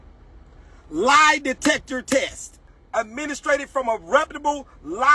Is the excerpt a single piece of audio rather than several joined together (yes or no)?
no